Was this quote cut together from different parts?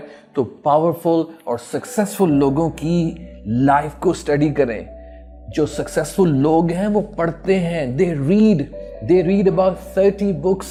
no; 0 cuts

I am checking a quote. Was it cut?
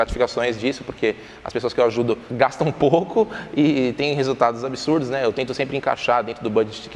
yes; 1 cut; at 2.3 s

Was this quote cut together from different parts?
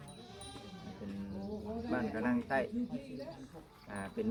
no; 0 cuts

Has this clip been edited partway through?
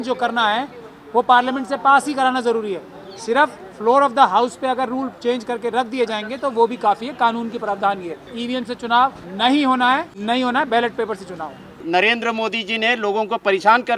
yes; 4 cuts; at 8.3 s, 9.2 s, 10.1 s, 11.8 s

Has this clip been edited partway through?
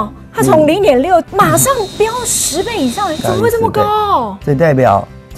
yes; 2 cuts; at 1.3 s, 4.3 s

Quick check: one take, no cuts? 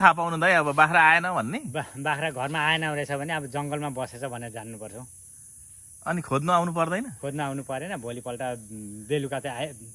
yes; 0 cuts

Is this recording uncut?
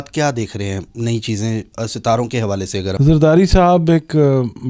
no; 1 cut; at 3.0 s

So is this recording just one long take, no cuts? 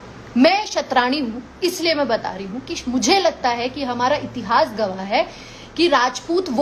yes; 0 cuts

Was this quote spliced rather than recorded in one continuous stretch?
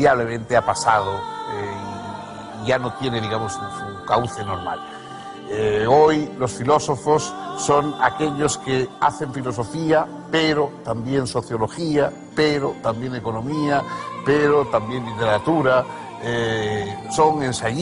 no; 0 cuts

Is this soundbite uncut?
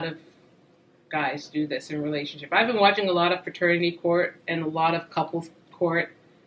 yes; 0 cuts

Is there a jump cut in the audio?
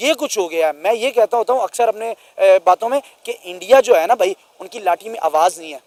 no; 0 cuts

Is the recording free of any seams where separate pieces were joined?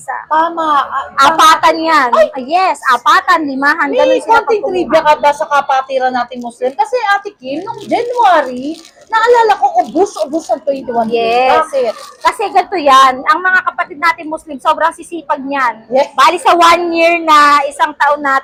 yes; 0 cuts

